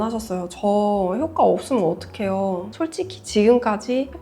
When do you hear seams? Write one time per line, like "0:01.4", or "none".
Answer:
0:02.7